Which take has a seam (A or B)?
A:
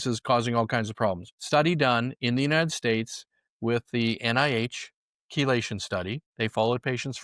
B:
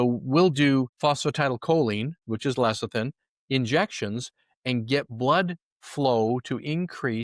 A